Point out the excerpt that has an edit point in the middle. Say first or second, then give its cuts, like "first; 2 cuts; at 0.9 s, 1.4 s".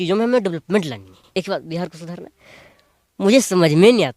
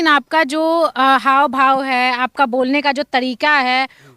first; 1 cut; at 1.2 s